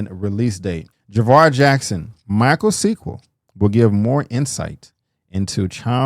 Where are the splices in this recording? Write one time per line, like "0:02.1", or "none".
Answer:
0:00.9